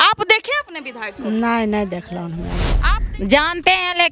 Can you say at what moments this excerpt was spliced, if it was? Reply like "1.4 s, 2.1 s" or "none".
2.7 s